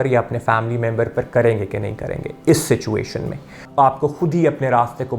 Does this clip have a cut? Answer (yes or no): yes